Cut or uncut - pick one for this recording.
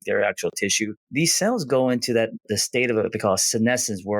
cut